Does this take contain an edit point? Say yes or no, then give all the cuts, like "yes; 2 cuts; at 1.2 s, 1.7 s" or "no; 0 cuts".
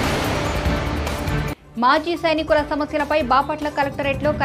yes; 1 cut; at 1.3 s